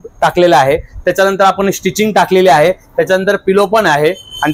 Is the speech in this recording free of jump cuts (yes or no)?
yes